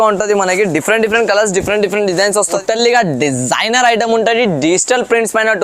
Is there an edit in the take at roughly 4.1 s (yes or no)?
no